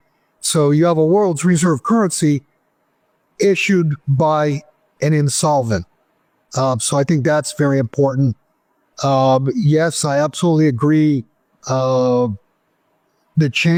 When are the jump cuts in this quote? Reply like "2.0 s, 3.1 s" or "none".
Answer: none